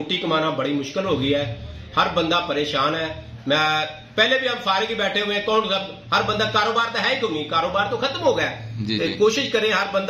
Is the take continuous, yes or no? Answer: yes